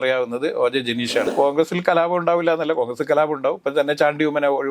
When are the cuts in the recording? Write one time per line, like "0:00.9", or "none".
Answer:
0:01.3